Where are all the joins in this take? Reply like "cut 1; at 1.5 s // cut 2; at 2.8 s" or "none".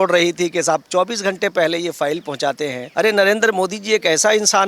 cut 1; at 2.8 s